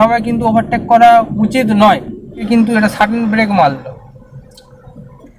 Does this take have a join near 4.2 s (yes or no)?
no